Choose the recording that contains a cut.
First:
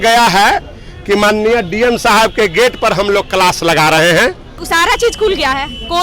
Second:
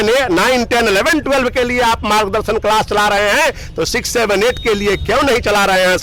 first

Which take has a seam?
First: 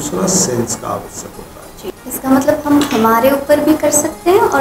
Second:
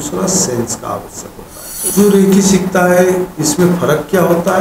second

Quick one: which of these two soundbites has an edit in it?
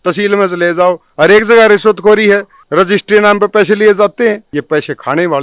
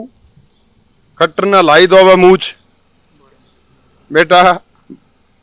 first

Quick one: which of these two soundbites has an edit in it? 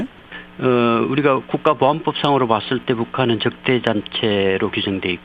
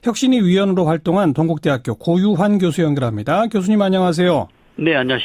first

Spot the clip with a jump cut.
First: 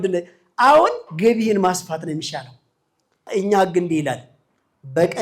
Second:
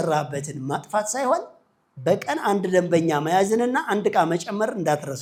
first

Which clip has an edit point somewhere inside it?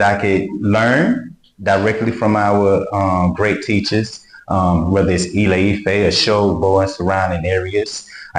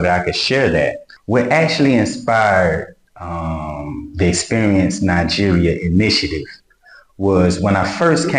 second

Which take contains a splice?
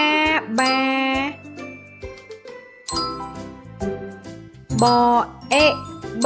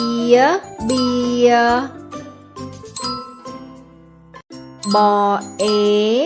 first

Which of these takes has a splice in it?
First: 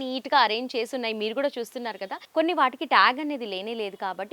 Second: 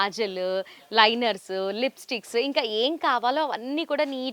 first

